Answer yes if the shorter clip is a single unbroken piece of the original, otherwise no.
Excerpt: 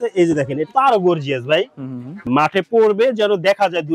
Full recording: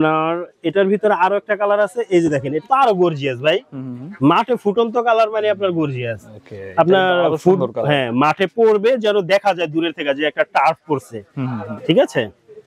no